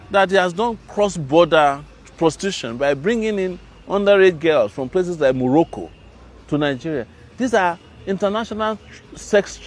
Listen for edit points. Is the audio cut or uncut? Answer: uncut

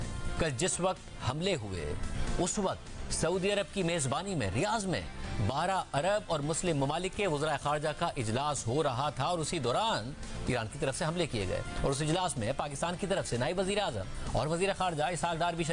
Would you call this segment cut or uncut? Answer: uncut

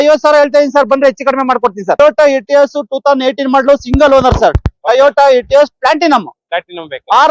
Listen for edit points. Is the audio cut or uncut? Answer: cut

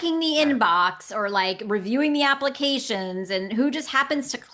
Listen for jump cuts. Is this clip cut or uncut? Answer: uncut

